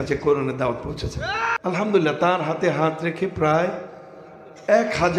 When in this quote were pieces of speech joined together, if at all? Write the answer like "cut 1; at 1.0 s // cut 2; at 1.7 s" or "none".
cut 1; at 1.5 s